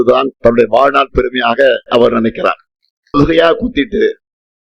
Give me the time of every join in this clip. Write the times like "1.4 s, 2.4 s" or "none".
3.1 s